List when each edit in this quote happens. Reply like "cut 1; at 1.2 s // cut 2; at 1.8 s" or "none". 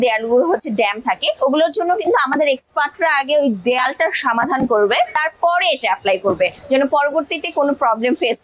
none